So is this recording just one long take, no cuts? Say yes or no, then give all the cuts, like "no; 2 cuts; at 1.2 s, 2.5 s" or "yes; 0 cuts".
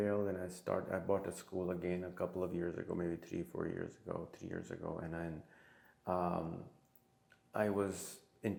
yes; 0 cuts